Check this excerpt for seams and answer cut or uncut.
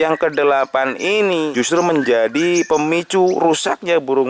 cut